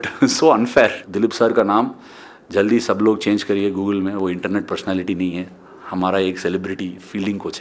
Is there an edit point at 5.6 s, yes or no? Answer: no